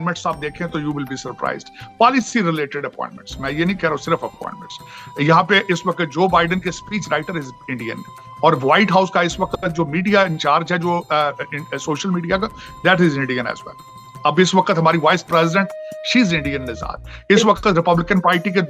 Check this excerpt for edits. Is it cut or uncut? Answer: uncut